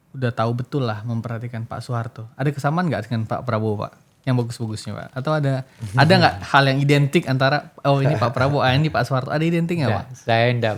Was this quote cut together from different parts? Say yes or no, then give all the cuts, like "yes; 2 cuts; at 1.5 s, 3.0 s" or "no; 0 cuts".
no; 0 cuts